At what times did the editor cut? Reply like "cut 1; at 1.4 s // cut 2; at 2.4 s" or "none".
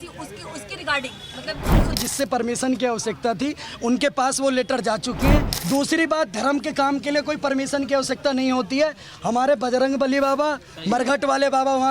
cut 1; at 2.0 s // cut 2; at 5.5 s